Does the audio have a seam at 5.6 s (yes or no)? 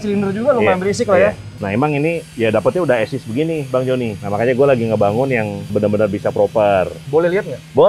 yes